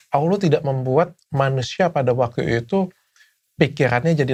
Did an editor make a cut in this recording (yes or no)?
no